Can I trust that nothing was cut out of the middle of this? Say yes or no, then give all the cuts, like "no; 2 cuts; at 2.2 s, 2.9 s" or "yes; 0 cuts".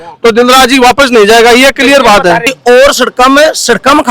no; 1 cut; at 2.5 s